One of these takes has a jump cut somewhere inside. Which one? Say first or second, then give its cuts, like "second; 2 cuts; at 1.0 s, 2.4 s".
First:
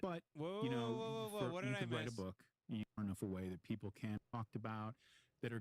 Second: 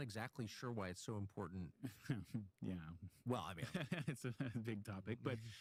first; 2 cuts; at 3.0 s, 4.2 s